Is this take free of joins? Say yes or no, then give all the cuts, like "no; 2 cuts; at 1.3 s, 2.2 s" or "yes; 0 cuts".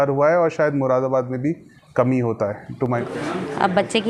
no; 1 cut; at 3.0 s